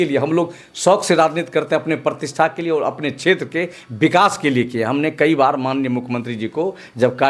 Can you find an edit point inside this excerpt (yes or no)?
no